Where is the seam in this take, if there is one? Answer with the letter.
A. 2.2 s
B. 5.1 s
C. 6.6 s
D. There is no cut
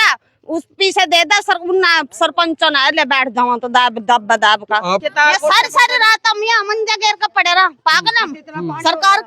B